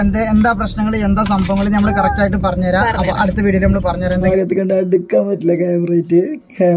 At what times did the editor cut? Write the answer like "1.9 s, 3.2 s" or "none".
4.3 s

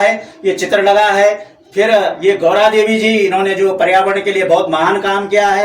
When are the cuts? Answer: none

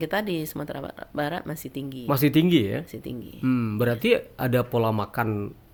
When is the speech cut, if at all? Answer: none

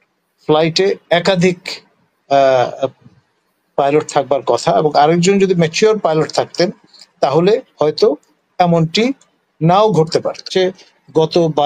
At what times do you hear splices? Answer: 10.5 s

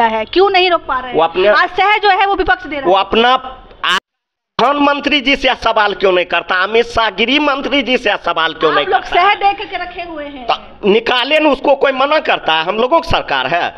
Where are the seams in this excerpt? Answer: none

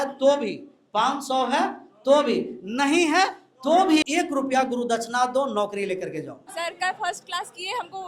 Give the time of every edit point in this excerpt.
4.0 s, 6.5 s

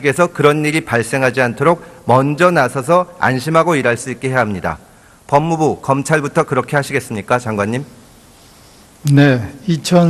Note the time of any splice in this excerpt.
8.3 s

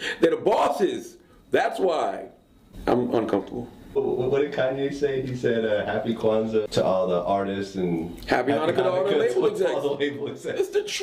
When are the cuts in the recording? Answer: none

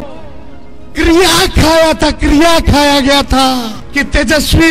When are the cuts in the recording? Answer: 3.8 s

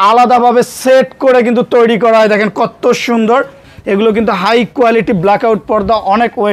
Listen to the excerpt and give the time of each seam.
3.7 s

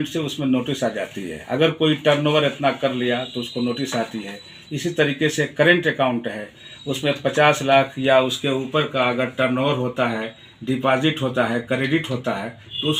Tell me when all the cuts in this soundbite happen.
none

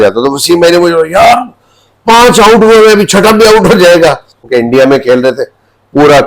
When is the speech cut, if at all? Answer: 4.4 s

